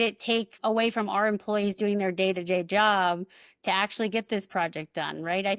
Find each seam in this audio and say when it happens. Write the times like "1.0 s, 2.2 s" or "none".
none

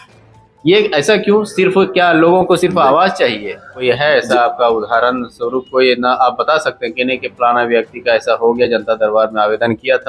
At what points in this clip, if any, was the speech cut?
3.8 s

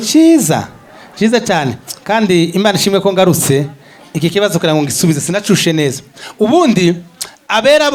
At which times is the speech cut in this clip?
none

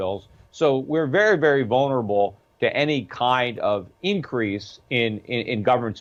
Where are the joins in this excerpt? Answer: none

